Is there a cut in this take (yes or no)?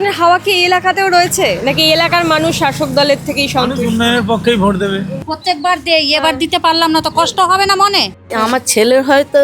yes